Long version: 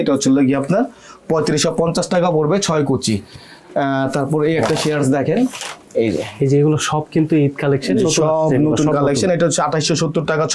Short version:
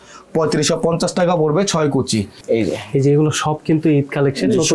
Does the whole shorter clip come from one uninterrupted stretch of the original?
no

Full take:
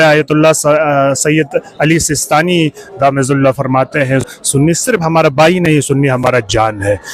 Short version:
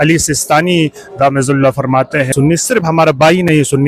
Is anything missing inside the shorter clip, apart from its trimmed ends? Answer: yes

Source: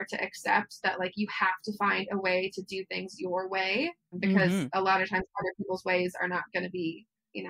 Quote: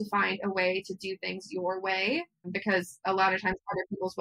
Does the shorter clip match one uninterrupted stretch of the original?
yes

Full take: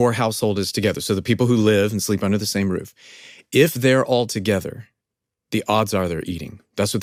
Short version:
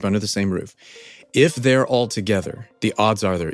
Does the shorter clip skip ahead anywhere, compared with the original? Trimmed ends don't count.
yes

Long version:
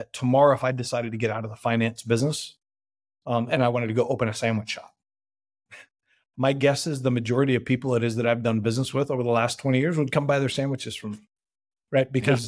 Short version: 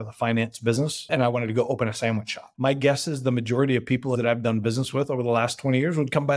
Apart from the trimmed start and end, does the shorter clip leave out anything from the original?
yes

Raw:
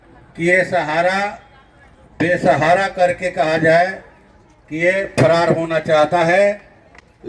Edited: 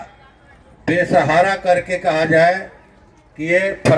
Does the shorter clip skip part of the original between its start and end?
no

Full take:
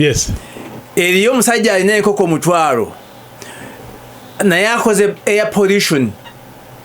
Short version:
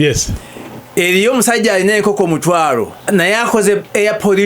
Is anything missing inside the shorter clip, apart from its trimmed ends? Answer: yes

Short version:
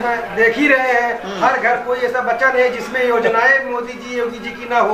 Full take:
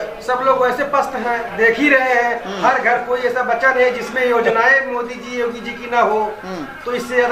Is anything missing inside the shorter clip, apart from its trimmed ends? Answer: no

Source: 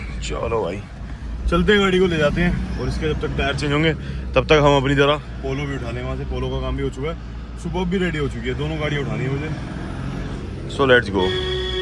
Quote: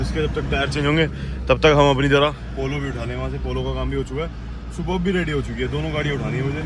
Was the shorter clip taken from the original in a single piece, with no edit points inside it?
yes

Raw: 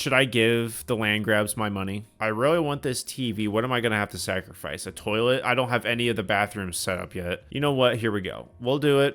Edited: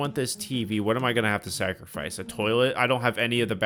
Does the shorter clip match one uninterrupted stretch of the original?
yes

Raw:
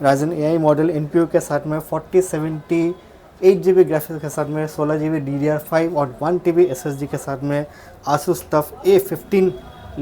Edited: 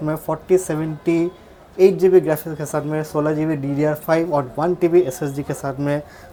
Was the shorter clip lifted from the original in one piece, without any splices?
yes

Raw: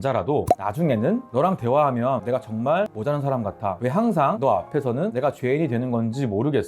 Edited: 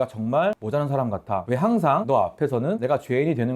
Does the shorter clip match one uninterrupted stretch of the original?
yes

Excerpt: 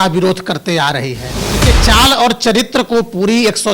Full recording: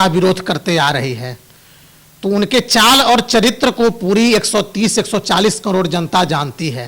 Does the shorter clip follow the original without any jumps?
no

